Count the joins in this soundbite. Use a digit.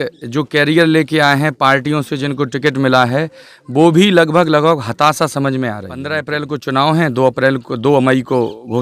1